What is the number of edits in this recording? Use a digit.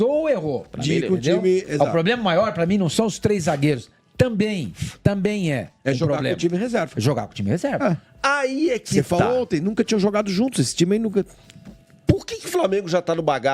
0